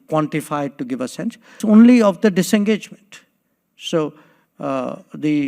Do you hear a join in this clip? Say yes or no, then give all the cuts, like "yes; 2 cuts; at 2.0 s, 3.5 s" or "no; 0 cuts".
yes; 1 cut; at 1.6 s